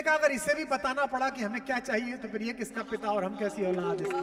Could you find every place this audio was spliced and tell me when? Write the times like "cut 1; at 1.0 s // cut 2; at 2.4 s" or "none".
none